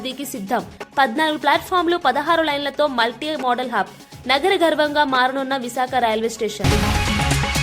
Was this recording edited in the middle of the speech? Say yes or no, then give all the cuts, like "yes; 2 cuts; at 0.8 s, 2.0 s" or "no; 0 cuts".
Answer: yes; 1 cut; at 6.6 s